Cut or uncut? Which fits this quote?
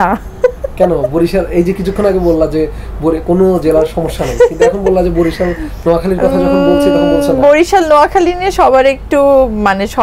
uncut